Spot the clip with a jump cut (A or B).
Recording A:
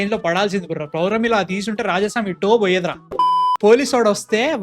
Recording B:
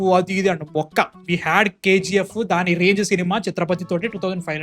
A